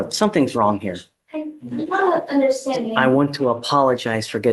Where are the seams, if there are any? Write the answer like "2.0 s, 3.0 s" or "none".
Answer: 2.9 s